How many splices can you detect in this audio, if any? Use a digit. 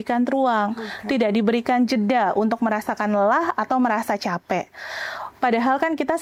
0